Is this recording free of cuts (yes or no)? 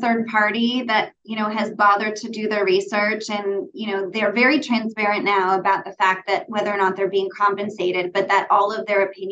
yes